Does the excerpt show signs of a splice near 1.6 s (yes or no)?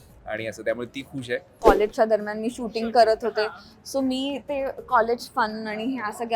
yes